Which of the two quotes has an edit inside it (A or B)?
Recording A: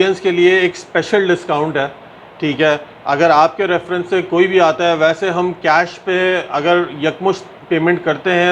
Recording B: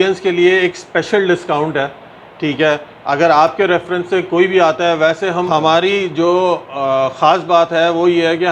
B